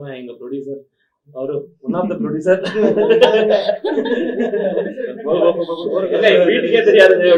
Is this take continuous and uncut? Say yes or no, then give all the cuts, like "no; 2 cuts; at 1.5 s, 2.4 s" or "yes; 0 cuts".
yes; 0 cuts